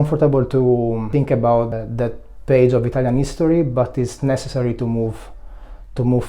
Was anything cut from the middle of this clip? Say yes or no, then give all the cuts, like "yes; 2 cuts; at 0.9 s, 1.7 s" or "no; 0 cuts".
yes; 2 cuts; at 1.1 s, 1.7 s